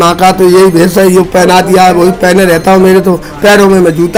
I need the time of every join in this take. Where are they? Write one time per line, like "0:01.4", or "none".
none